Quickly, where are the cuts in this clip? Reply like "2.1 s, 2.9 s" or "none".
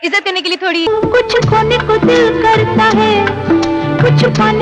0.9 s